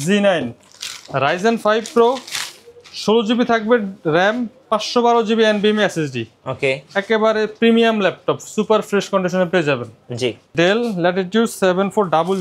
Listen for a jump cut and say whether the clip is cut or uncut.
cut